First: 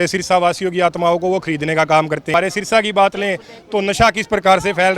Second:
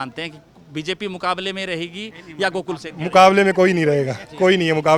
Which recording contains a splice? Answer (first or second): first